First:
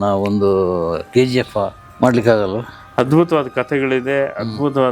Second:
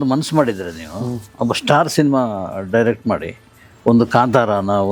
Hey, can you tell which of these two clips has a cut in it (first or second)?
first